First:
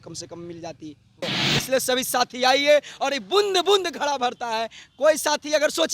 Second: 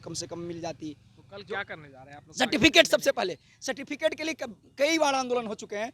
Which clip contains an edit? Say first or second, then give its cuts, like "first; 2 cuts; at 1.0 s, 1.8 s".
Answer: first; 1 cut; at 1.2 s